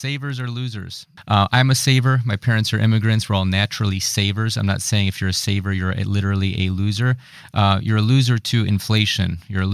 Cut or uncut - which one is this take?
cut